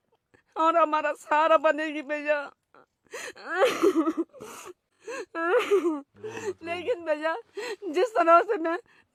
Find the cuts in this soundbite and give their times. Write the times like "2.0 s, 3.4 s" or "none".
none